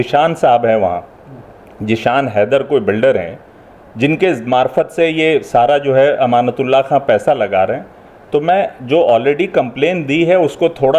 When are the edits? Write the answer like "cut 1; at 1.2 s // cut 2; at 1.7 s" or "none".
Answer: none